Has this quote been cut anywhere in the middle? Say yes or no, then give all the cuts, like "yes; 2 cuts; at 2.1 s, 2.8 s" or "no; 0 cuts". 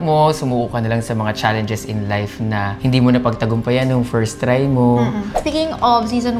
yes; 2 cuts; at 2.7 s, 5.4 s